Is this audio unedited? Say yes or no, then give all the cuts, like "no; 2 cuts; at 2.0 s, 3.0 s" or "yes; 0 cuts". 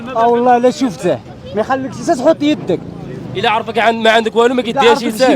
yes; 0 cuts